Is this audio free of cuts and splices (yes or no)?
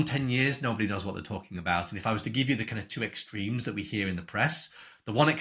yes